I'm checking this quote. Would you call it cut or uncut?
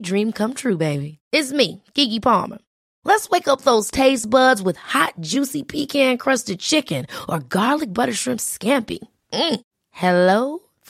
uncut